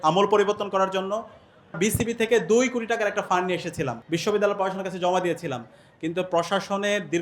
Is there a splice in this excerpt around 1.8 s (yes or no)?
yes